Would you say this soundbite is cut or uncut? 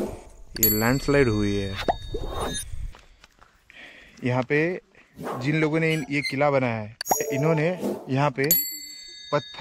cut